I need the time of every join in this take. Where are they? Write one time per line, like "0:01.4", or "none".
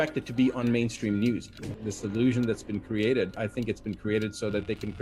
0:01.5